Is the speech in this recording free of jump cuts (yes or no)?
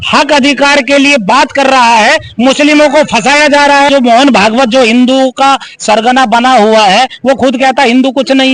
no